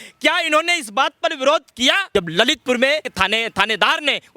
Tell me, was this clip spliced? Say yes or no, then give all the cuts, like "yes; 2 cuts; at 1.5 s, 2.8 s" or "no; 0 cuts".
yes; 2 cuts; at 2.0 s, 3.1 s